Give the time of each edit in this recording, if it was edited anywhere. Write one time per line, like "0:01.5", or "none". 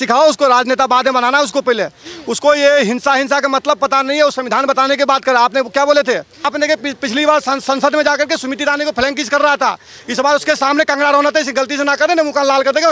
0:06.5